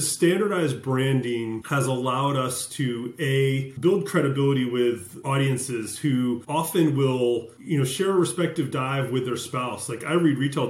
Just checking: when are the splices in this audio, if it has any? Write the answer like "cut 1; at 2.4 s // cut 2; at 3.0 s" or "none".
cut 1; at 1.6 s // cut 2; at 3.7 s // cut 3; at 5.1 s // cut 4; at 6.4 s // cut 5; at 7.5 s